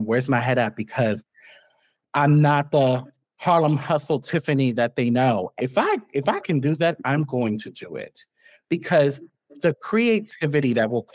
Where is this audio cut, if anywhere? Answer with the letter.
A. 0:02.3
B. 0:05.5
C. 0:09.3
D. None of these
B